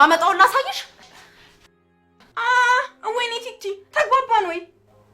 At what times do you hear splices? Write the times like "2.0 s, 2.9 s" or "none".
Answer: 2.3 s